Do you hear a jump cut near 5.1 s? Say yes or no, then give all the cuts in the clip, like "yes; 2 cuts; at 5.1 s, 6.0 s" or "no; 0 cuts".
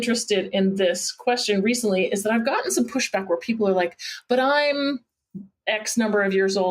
no; 0 cuts